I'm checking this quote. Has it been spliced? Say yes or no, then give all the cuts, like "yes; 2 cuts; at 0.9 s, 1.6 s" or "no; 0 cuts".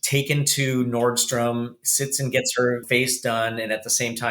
yes; 1 cut; at 2.8 s